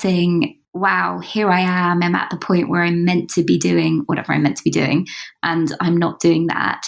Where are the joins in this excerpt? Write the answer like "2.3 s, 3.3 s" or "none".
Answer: none

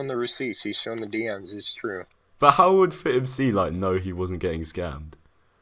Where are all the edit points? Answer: none

